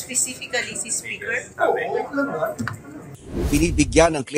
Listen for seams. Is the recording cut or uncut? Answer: cut